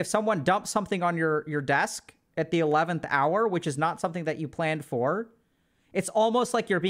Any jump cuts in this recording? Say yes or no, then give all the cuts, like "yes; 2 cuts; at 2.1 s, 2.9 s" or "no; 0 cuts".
no; 0 cuts